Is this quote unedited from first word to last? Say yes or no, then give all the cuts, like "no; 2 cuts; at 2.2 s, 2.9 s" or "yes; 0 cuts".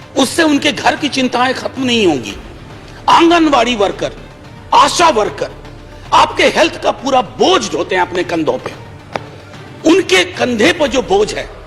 yes; 0 cuts